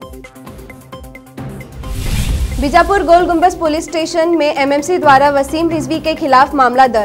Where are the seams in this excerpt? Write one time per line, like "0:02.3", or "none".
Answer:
none